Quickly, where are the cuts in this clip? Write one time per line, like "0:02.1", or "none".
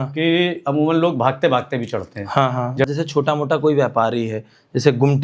0:02.9